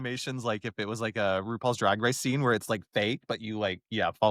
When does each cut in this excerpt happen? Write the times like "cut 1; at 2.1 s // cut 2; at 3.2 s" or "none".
none